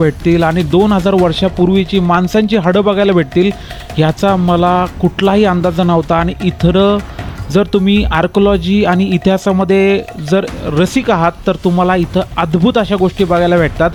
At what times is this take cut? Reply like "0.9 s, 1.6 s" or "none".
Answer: none

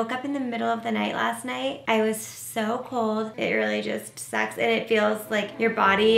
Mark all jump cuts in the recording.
3.3 s

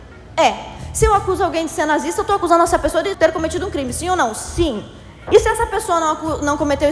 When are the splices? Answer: 3.1 s

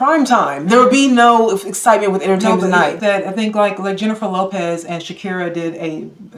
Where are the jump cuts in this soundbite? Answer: 3.0 s

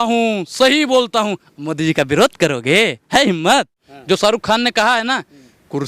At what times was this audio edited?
3.9 s

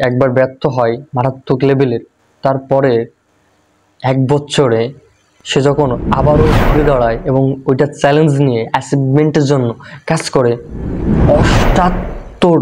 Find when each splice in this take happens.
none

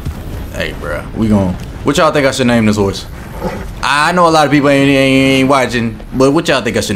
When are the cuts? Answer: none

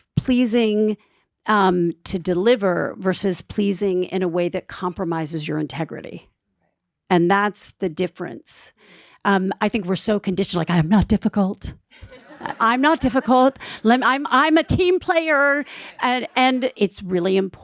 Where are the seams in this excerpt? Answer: 16.7 s

